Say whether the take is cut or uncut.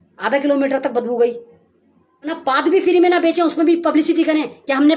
cut